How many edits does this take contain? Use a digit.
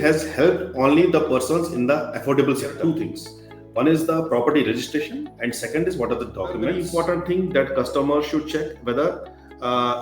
2